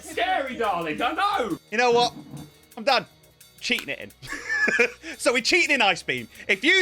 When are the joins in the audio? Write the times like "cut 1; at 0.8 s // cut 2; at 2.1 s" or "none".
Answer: cut 1; at 1.6 s